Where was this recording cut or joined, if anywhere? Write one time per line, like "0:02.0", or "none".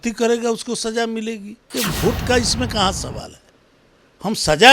0:01.6